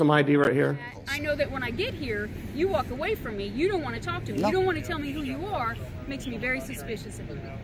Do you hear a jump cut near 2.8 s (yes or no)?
no